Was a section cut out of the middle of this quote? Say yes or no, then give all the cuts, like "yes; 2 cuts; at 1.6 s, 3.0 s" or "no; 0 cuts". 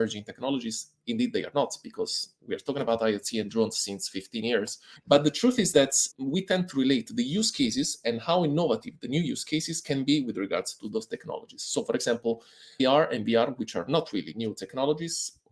no; 0 cuts